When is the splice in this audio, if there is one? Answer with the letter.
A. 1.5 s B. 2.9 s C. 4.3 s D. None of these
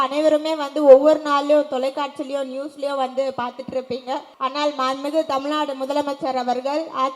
C